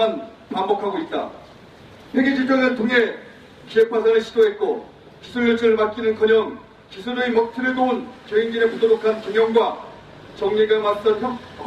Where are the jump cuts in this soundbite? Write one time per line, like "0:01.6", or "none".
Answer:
0:07.5

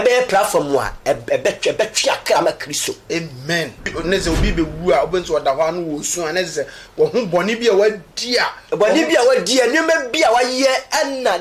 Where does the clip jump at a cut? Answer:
0:03.9

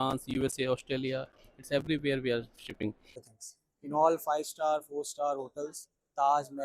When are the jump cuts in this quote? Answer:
0:03.2

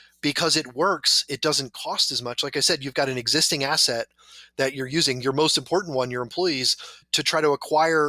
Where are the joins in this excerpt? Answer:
0:07.1

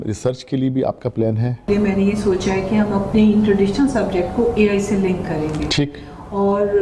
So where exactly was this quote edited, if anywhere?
0:01.7

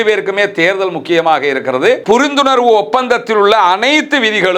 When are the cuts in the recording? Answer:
0:02.0

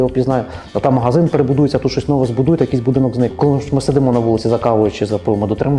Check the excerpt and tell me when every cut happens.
0:03.3

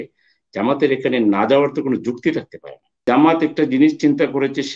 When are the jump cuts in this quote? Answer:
0:03.0

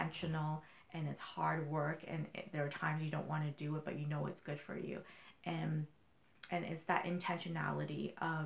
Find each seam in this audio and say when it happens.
none

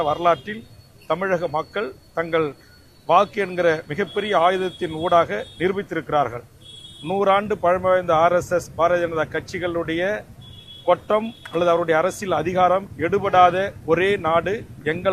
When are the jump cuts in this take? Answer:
none

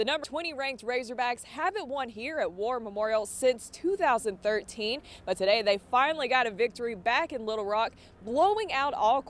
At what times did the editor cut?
none

